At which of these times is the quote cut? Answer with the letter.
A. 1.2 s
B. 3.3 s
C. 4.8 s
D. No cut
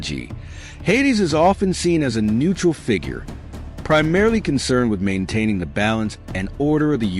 C